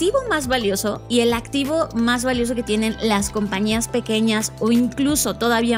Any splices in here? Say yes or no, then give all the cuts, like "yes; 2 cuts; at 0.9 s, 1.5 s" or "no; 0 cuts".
yes; 1 cut; at 1.0 s